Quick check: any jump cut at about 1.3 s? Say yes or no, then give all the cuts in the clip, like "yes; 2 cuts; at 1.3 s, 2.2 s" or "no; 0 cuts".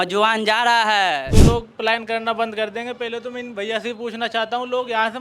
yes; 1 cut; at 1.3 s